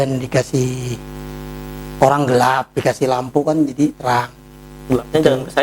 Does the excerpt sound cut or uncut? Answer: uncut